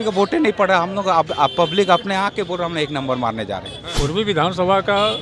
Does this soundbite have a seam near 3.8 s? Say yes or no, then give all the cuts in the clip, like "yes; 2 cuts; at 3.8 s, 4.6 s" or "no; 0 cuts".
yes; 1 cut; at 3.8 s